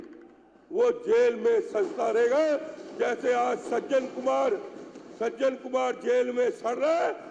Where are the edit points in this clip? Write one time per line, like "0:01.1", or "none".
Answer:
none